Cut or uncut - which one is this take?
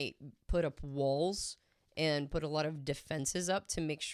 uncut